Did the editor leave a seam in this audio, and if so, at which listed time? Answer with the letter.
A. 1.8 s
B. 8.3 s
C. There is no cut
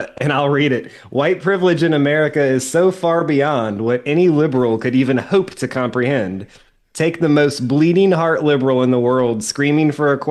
C